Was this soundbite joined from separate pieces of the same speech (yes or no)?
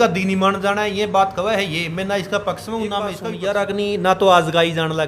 yes